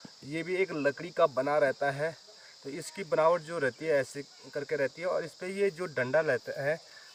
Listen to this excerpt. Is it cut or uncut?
uncut